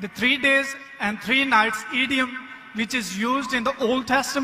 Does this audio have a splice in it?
no; 0 cuts

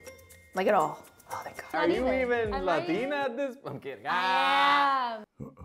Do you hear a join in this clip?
yes; 1 cut; at 1.6 s

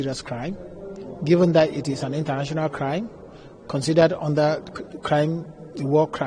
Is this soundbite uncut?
yes; 0 cuts

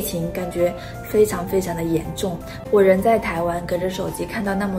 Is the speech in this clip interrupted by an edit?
yes; 1 cut; at 2.6 s

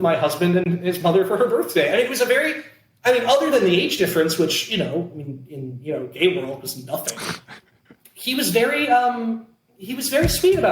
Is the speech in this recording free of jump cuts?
no; 1 cut; at 7.6 s

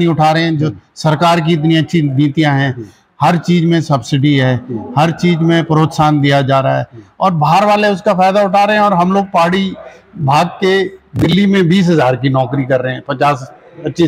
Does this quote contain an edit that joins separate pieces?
no; 0 cuts

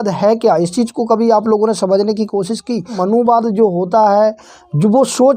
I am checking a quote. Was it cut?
yes; 1 cut; at 3.0 s

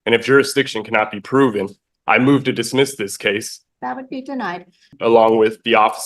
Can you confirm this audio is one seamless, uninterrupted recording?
no; 2 cuts; at 3.6 s, 4.9 s

